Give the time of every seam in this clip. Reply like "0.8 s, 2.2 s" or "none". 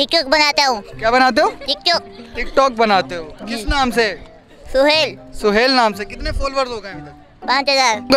none